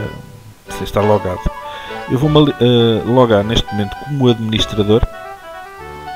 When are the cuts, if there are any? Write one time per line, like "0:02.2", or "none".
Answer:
0:05.1

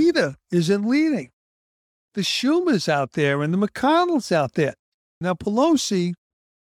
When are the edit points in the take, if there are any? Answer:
0:05.1

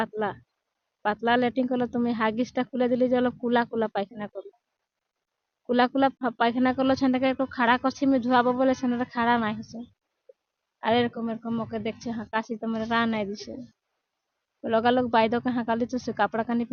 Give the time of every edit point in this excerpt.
none

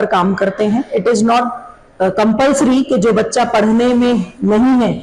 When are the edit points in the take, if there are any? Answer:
none

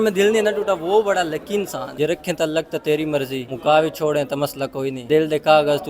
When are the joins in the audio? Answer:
0:01.9
0:03.4
0:05.0

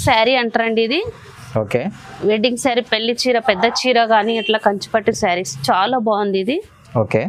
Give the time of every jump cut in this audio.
none

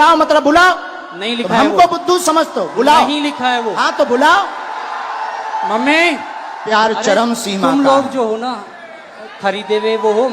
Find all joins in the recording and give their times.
0:06.6

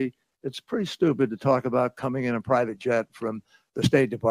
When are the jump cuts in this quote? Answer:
0:03.2

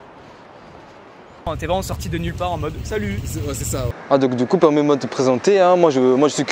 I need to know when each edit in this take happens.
0:01.5
0:03.8

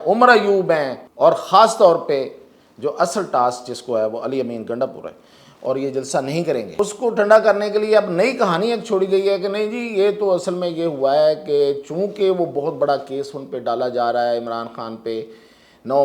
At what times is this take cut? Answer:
0:01.0
0:06.8

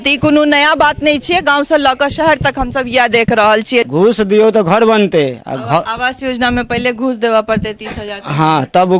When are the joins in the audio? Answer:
0:03.9

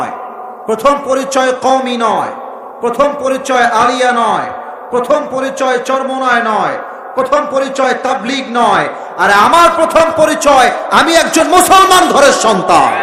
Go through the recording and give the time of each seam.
none

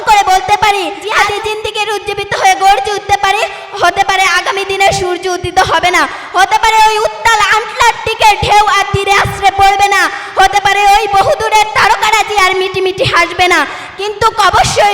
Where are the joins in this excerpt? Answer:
0:01.1

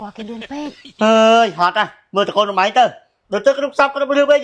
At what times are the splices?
none

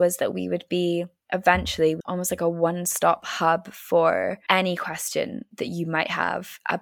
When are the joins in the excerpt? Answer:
none

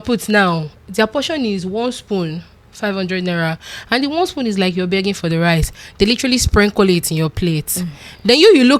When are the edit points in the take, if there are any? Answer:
none

